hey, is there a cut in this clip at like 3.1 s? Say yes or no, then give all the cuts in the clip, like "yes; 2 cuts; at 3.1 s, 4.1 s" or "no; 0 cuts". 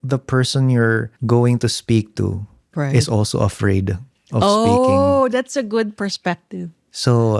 no; 1 cut; at 1.1 s